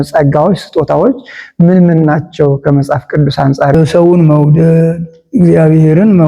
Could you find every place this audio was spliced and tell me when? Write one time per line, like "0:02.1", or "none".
0:03.7